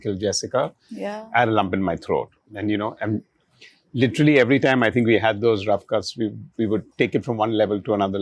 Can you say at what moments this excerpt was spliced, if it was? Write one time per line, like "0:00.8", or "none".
none